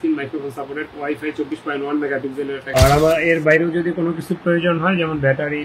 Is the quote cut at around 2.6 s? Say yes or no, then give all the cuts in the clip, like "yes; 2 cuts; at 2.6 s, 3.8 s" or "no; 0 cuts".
yes; 1 cut; at 2.6 s